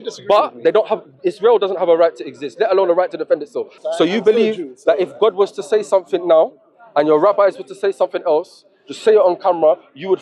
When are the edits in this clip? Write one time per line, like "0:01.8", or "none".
0:03.7